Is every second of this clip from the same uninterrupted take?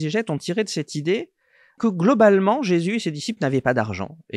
no; 1 cut; at 1.8 s

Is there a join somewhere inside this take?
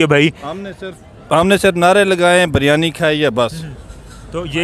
no; 0 cuts

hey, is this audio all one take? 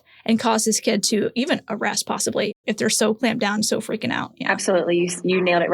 no; 2 cuts; at 2.6 s, 4.3 s

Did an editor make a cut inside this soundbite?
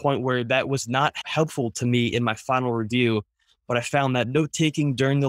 yes; 1 cut; at 1.2 s

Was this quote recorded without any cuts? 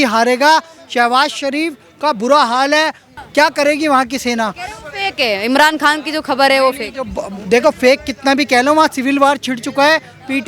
yes; 0 cuts

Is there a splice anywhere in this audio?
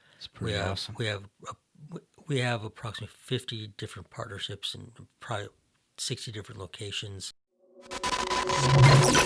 yes; 1 cut; at 7.9 s

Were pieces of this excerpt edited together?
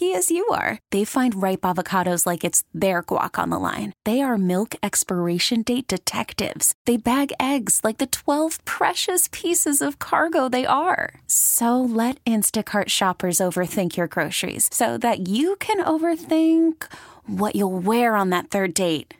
no; 0 cuts

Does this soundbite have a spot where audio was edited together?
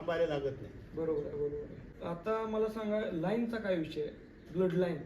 yes; 1 cut; at 1.9 s

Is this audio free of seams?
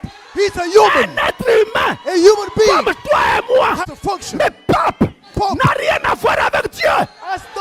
no; 1 cut; at 3.8 s

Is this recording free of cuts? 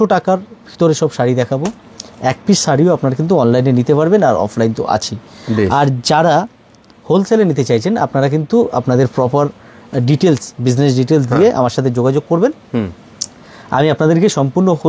yes; 0 cuts

